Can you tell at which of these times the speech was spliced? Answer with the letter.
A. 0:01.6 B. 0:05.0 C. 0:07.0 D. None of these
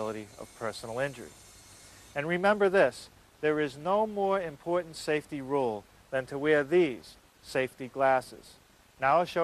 C